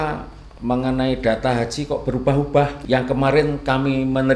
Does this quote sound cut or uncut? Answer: cut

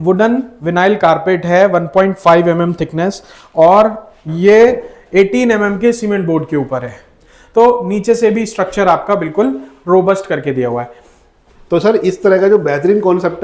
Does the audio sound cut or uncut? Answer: uncut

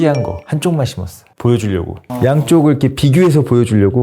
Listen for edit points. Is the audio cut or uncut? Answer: cut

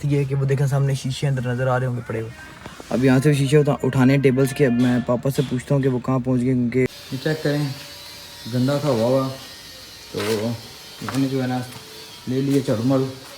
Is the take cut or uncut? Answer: cut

